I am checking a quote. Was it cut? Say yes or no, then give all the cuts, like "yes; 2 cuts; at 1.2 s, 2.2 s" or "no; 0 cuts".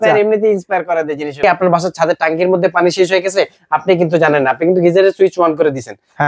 yes; 1 cut; at 1.4 s